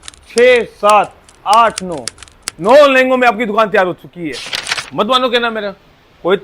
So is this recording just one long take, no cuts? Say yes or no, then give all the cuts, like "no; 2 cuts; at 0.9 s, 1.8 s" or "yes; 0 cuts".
no; 1 cut; at 4.3 s